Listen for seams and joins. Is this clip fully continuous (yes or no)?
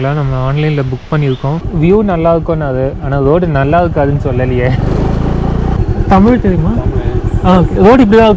no